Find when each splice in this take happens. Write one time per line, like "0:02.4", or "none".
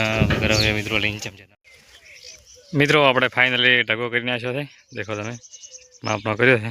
0:01.2